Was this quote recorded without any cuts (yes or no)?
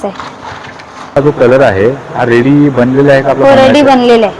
no